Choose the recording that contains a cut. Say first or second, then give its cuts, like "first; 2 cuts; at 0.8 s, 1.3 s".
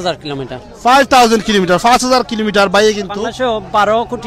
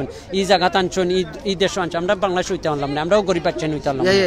first; 1 cut; at 3.1 s